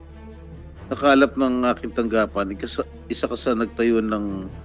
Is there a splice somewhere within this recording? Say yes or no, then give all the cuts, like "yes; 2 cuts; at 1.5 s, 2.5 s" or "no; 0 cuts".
yes; 1 cut; at 0.9 s